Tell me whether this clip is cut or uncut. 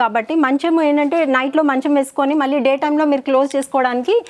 uncut